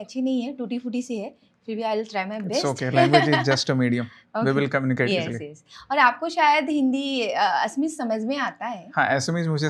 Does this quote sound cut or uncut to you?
uncut